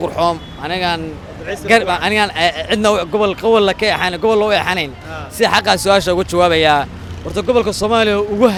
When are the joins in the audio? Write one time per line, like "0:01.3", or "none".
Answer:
none